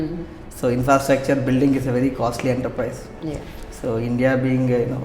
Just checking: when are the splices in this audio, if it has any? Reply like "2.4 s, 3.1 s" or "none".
none